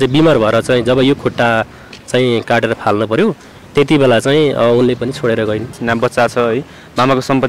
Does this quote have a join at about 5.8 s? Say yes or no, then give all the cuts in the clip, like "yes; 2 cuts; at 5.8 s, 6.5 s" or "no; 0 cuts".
yes; 1 cut; at 5.8 s